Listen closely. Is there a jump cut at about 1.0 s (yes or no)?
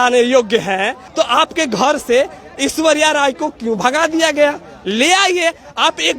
yes